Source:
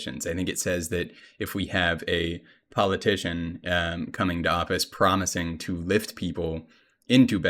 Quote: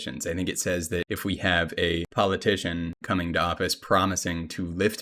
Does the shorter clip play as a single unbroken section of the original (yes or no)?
no